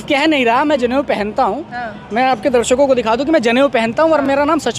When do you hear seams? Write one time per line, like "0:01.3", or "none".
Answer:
none

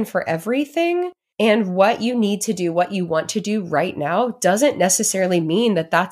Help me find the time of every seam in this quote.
0:01.2

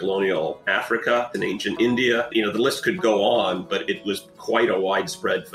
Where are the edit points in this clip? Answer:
0:01.3

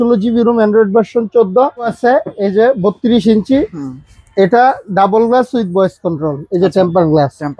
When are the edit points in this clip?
0:01.9

